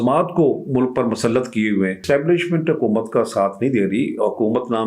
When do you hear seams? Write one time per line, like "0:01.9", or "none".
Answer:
0:02.0